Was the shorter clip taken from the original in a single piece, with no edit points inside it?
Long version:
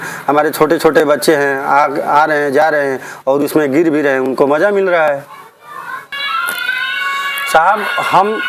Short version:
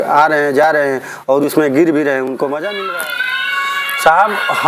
no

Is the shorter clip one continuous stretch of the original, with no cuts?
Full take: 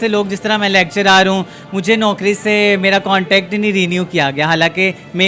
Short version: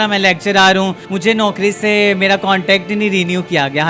no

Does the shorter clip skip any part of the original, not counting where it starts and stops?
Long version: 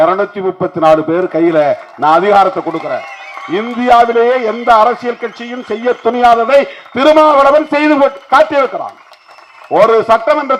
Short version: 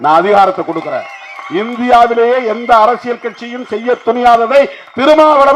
no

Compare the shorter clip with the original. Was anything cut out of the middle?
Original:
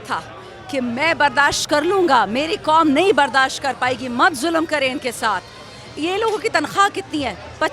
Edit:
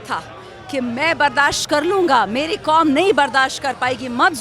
no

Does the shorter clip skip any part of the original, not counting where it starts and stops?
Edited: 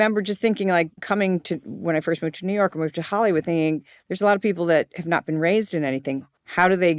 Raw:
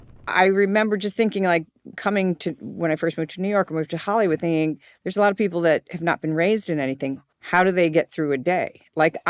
yes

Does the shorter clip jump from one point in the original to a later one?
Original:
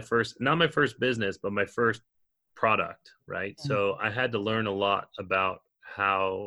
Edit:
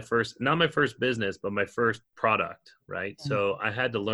yes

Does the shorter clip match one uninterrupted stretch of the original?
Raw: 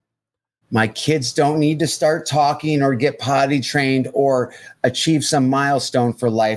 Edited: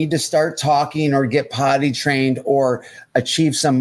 yes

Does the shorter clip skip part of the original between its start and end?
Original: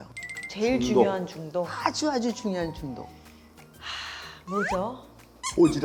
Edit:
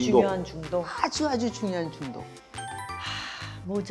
no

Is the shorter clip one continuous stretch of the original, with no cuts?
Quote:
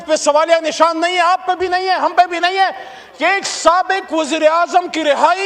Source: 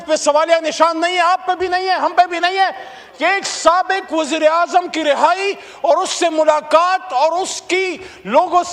yes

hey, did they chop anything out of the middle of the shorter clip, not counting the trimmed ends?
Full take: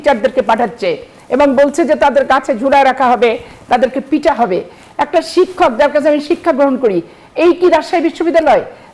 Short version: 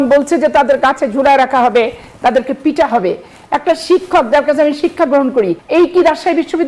yes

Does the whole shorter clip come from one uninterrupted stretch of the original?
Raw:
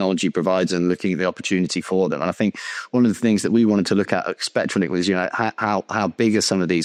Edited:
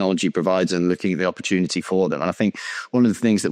yes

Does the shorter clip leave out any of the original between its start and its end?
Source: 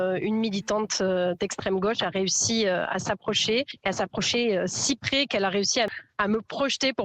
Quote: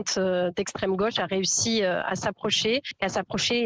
no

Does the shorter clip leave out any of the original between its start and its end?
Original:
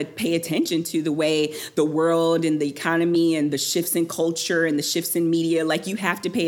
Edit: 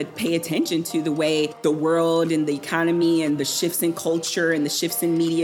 yes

